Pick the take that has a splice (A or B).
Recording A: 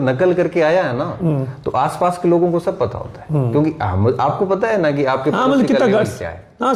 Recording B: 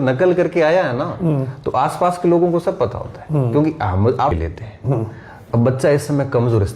B